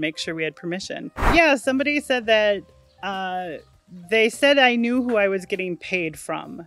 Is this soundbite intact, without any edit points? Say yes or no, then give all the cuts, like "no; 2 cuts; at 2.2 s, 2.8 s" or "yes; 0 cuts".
no; 1 cut; at 1.3 s